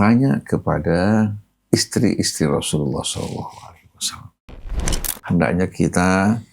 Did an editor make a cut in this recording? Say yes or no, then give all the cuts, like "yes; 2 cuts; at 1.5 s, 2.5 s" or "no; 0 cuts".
yes; 2 cuts; at 1.5 s, 4.8 s